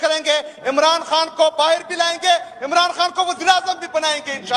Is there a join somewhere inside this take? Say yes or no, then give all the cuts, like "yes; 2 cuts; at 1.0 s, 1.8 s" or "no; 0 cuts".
no; 0 cuts